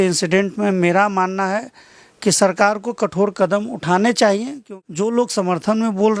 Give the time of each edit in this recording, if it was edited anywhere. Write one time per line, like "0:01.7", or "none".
0:04.6